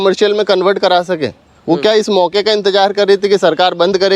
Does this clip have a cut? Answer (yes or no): no